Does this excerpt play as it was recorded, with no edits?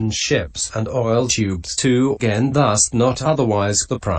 yes; 0 cuts

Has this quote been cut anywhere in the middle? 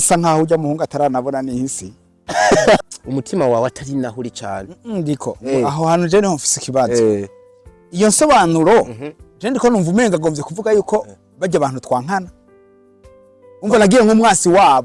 yes; 1 cut; at 2.9 s

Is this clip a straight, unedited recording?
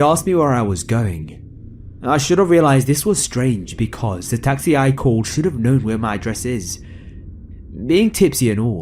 no; 1 cut; at 7.5 s

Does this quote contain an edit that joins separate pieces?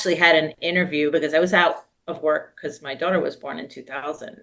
no; 0 cuts

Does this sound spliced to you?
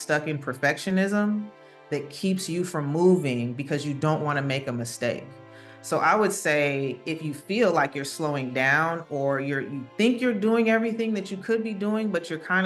no; 0 cuts

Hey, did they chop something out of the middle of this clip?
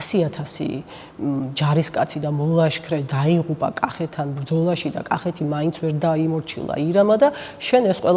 no; 0 cuts

